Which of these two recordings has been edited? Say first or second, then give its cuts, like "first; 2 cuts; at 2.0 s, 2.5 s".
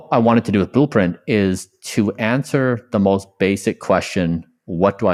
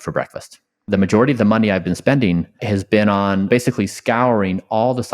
second; 3 cuts; at 0.8 s, 2.6 s, 3.5 s